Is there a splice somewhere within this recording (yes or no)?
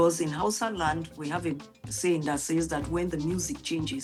no